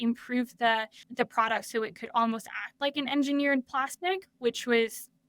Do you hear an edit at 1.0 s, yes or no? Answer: yes